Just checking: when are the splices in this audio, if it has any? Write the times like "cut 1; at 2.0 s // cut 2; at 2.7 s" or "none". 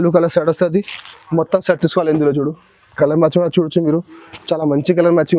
none